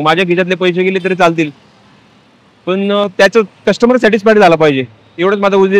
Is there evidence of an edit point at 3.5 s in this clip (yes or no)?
no